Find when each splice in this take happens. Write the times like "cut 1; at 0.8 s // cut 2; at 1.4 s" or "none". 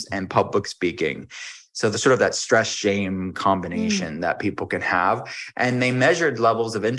none

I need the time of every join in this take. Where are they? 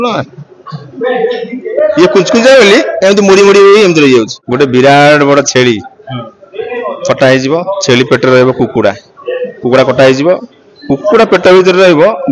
cut 1; at 4.4 s

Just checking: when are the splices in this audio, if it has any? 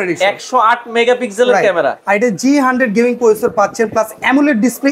none

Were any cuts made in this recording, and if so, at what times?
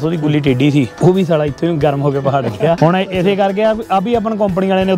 cut 1; at 0.9 s // cut 2; at 2.8 s

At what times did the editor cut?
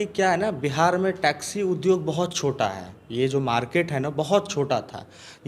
none

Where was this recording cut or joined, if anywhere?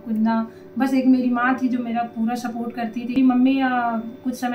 cut 1; at 3.1 s

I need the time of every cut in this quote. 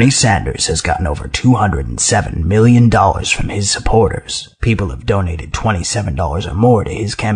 cut 1; at 3.4 s

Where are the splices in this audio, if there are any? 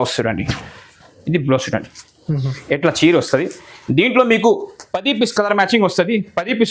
none

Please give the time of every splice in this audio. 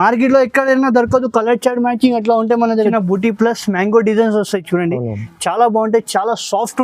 cut 1; at 2.9 s

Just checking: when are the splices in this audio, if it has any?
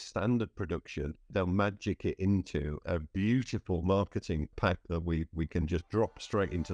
cut 1; at 1.3 s // cut 2; at 2.8 s // cut 3; at 4.5 s

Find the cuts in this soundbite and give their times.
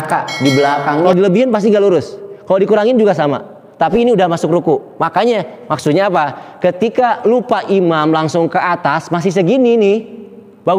cut 1; at 1.1 s

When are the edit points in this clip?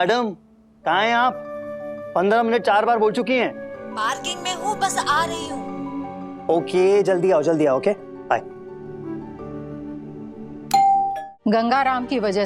cut 1; at 11.2 s

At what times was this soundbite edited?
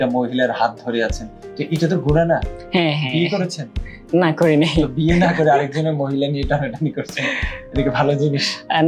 none

